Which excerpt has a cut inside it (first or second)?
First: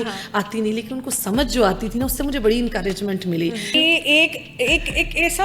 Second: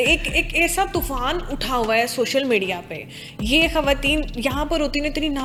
first